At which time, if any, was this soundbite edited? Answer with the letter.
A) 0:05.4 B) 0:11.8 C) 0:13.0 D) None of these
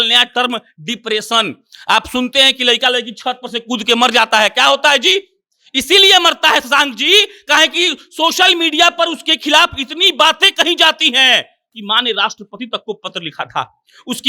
B